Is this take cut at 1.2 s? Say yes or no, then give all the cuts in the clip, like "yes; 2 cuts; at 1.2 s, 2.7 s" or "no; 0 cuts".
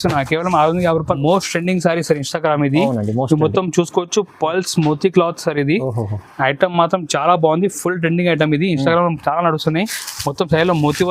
yes; 1 cut; at 1.2 s